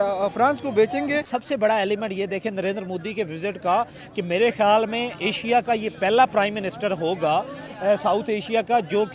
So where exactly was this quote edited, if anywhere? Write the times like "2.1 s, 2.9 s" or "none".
1.3 s